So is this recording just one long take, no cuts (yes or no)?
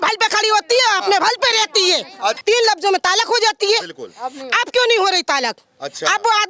no